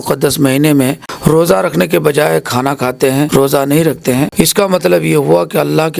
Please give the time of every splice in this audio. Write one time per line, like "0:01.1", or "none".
0:01.1
0:03.3
0:04.3

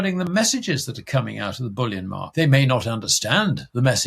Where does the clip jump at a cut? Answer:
0:02.3

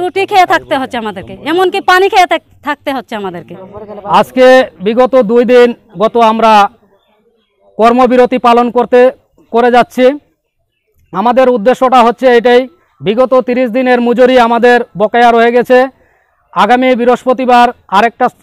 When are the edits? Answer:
none

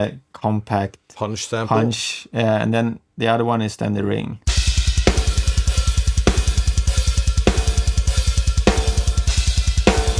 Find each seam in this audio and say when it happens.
none

